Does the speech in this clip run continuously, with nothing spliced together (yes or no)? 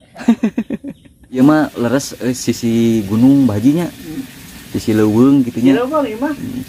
no